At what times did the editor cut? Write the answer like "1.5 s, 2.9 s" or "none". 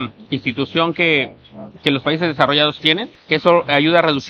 3.1 s